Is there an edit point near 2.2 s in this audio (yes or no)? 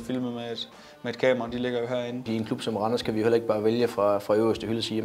yes